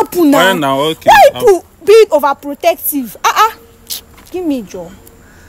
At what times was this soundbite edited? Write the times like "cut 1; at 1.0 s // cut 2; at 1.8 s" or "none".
none